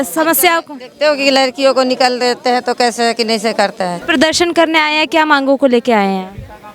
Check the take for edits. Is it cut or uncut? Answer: cut